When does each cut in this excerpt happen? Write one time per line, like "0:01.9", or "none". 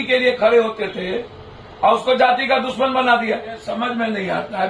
0:03.6